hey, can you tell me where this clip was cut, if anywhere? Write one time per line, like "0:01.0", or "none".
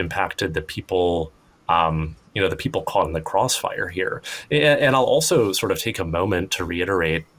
none